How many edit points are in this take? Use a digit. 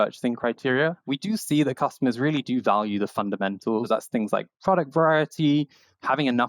2